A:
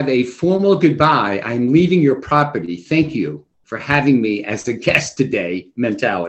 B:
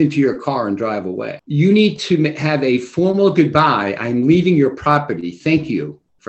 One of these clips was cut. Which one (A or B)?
B